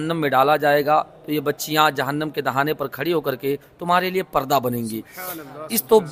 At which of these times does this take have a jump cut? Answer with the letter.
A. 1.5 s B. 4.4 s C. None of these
C